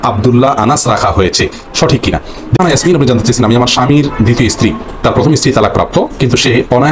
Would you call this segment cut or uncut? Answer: cut